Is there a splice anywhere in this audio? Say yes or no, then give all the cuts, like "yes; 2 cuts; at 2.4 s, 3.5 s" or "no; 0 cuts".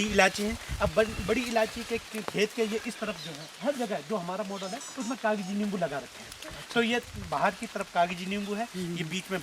no; 0 cuts